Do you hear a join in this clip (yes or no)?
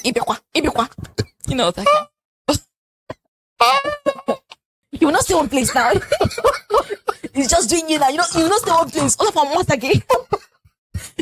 no